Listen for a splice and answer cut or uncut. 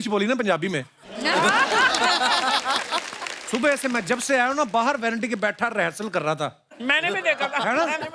uncut